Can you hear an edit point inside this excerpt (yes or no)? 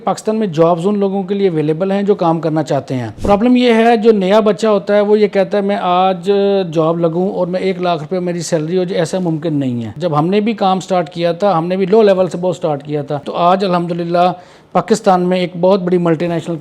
yes